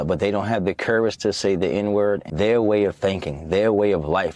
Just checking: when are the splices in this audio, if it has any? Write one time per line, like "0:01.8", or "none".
0:02.3